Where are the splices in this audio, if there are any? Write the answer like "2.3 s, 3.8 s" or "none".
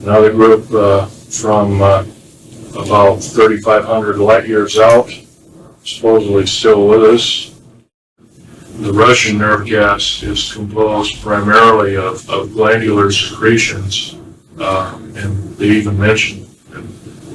8.3 s